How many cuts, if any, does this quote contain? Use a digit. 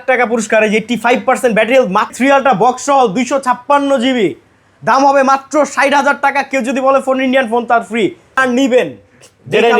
2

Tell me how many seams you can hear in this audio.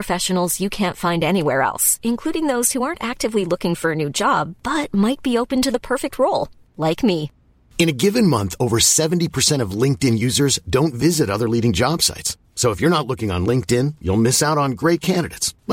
0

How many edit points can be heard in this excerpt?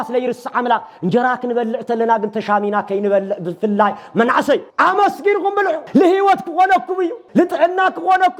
3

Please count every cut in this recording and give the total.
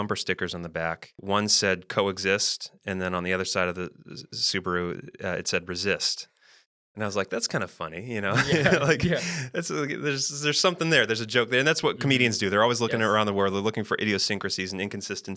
1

